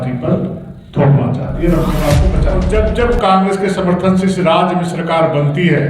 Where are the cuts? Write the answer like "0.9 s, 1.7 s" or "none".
2.5 s